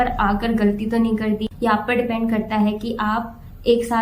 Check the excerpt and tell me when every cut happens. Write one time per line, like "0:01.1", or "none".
0:01.5